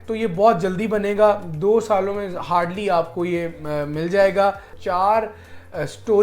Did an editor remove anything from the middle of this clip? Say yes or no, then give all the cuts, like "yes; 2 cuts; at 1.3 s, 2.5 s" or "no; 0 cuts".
yes; 1 cut; at 4.7 s